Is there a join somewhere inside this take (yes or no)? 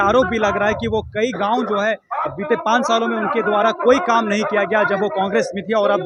no